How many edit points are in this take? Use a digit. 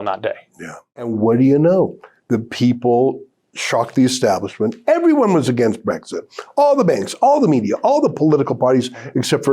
1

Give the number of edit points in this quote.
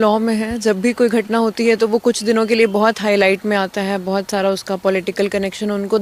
0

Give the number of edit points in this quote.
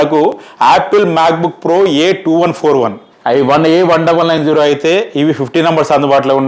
1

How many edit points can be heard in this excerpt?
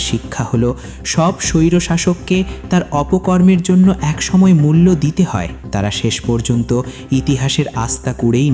1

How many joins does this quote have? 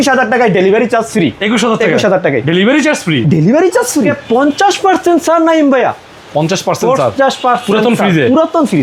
0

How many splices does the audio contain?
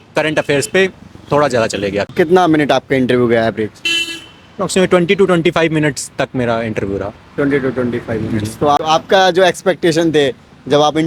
2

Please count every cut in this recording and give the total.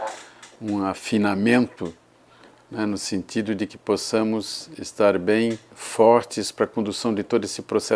0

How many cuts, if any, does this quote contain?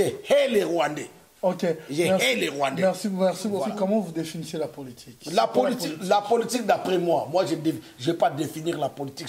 1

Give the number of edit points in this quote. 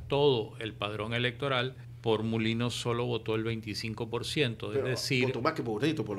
1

